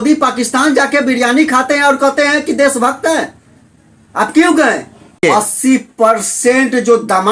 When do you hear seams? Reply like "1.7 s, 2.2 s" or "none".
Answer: 5.2 s